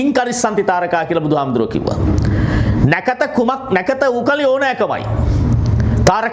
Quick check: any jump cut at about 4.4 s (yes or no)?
no